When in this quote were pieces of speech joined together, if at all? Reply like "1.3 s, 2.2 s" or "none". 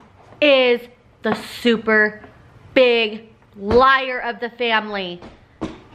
none